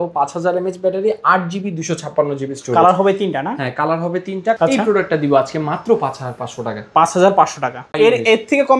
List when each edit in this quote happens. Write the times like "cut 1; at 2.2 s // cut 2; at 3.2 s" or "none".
cut 1; at 4.6 s // cut 2; at 7.9 s